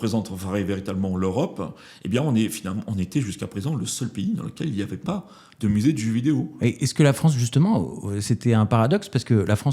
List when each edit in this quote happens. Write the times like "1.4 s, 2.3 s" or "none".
none